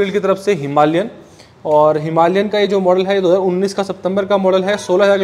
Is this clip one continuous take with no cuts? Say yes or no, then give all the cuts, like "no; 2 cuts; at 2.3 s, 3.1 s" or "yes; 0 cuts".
yes; 0 cuts